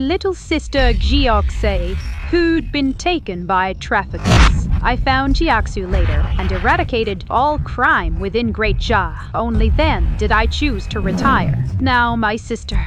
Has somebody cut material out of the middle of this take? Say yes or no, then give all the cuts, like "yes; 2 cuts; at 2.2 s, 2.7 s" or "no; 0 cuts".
no; 0 cuts